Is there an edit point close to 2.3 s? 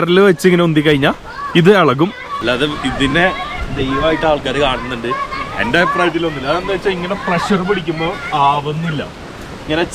yes; 1 cut; at 2.3 s

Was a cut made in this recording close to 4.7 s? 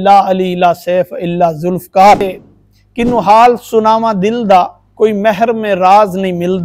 no; 1 cut; at 2.4 s

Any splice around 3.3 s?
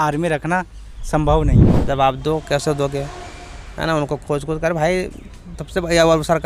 no; 1 cut; at 1.7 s

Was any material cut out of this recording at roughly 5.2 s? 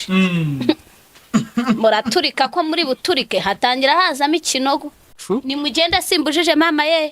yes; 1 cut; at 5.2 s

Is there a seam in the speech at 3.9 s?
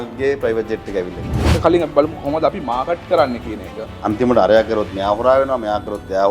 yes; 2 cuts; at 1.6 s, 3.9 s

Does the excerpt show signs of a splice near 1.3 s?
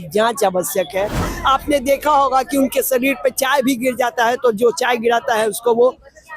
yes; 1 cut; at 1.3 s

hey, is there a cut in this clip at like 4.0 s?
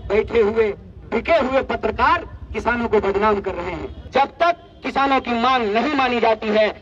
yes; 1 cut; at 4.0 s

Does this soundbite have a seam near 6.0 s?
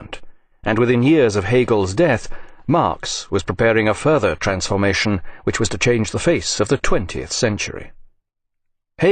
yes; 1 cut; at 6.0 s

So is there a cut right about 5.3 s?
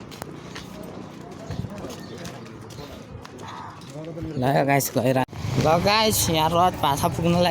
yes; 1 cut; at 5.3 s

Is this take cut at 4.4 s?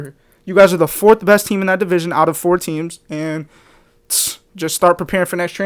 no; 0 cuts

